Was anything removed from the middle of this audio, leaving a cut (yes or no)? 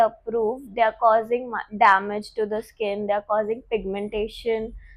no